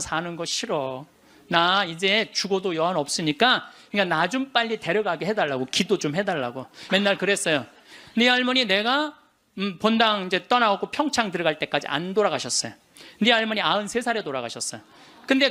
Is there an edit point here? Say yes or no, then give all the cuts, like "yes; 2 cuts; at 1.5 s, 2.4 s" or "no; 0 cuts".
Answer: yes; 2 cuts; at 3.8 s, 6.7 s